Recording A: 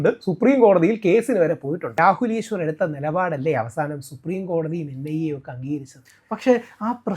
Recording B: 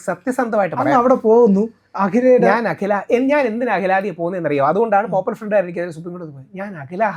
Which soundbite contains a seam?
A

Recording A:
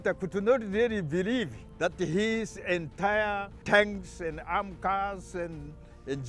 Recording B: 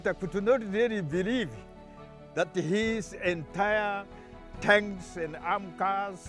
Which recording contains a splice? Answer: A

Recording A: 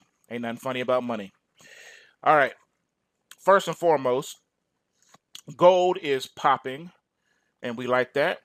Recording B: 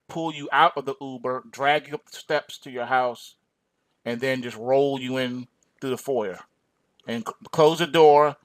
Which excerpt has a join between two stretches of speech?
B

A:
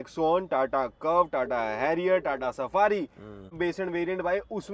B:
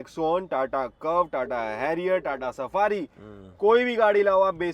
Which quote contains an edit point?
A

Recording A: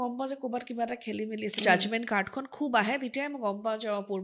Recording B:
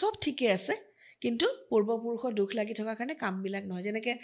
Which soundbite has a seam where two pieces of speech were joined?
A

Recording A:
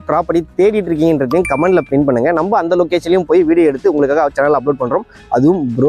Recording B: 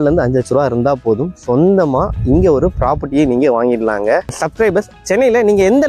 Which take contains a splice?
B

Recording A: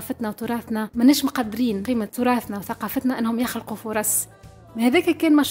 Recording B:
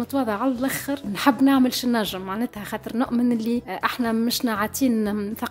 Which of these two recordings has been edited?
A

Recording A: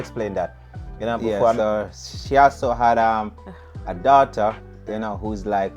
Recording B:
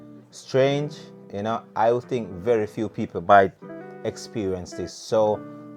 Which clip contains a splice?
A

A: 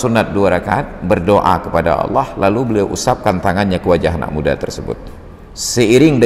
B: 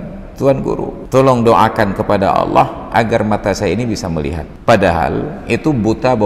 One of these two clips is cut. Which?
B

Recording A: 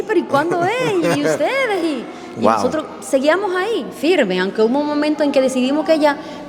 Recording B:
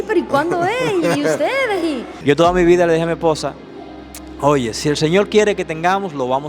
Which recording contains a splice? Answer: B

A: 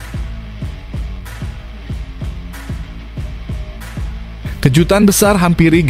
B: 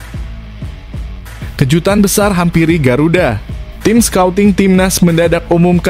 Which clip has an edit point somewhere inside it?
B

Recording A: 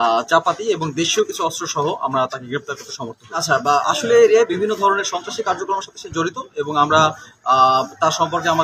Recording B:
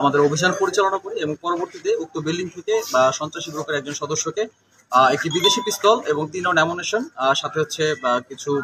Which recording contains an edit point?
A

